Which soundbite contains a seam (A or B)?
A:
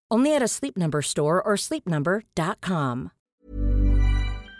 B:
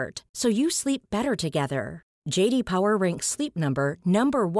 A